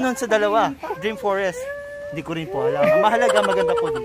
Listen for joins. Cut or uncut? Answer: cut